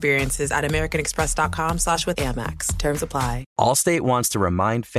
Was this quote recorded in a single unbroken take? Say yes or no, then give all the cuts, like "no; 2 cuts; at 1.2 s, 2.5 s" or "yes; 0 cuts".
no; 1 cut; at 3.5 s